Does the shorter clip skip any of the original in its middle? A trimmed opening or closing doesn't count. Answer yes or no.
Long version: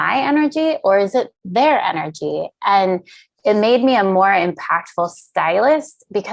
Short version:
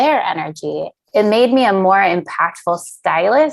yes